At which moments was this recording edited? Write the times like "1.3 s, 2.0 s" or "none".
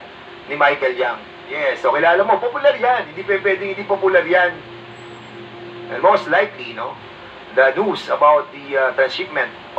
1.4 s, 5.2 s